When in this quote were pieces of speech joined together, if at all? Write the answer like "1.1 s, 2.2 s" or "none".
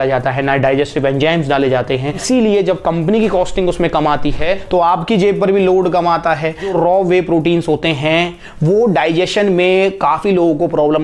2.2 s, 6.7 s